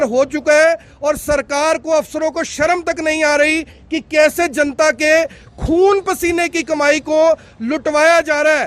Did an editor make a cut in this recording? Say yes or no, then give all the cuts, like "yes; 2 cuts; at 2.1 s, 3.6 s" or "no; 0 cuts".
no; 0 cuts